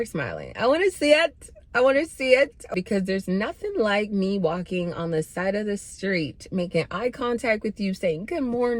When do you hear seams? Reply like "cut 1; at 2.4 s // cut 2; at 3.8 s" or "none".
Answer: cut 1; at 2.7 s